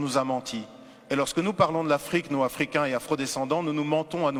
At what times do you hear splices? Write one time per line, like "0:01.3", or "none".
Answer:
none